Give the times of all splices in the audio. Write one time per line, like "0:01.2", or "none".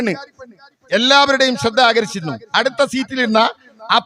none